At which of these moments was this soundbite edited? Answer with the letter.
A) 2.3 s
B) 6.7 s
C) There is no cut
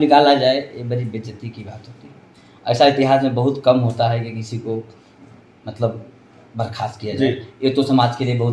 C